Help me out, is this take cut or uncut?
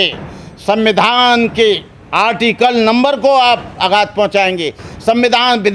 uncut